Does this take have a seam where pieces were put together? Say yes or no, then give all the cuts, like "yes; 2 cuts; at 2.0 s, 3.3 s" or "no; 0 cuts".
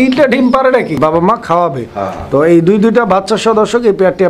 yes; 1 cut; at 1.0 s